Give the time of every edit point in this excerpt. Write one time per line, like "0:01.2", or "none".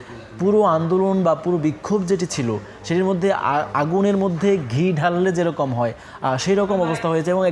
none